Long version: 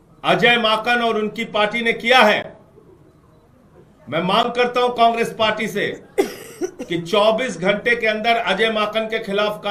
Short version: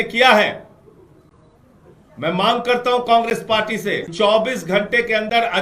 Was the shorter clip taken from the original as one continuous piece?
no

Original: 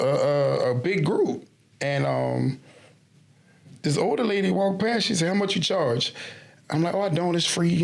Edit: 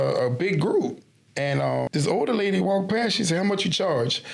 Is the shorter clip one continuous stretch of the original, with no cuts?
no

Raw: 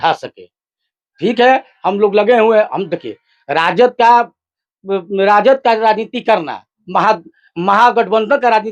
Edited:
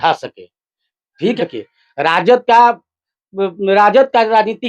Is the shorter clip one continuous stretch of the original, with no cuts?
no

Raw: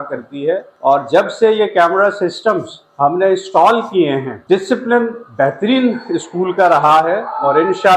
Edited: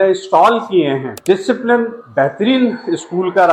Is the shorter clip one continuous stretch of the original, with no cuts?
yes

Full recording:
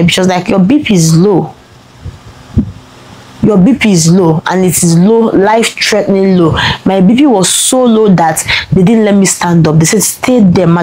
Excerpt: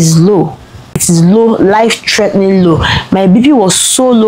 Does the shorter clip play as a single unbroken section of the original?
no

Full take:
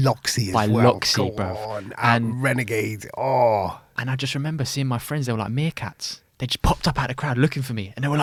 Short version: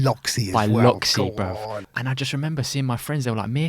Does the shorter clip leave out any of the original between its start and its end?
yes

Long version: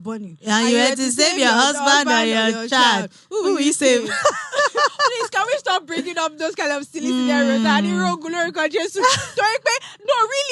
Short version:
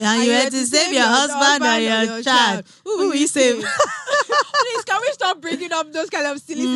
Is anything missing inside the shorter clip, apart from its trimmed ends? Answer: no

